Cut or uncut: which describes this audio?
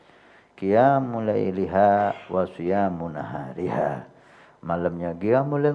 uncut